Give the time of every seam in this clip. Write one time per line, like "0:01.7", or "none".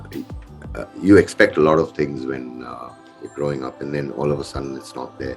none